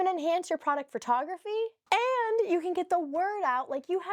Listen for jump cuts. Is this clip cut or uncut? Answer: uncut